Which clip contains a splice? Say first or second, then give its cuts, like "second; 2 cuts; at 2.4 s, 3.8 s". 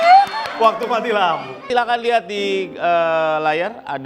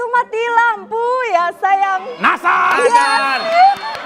first; 1 cut; at 1.6 s